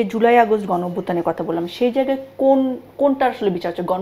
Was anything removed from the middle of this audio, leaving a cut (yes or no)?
no